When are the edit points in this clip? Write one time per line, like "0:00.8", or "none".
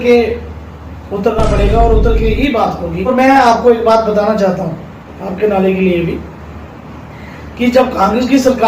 0:03.1